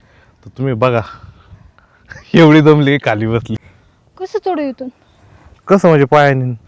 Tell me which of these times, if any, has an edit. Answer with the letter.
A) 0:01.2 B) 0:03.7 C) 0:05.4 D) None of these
B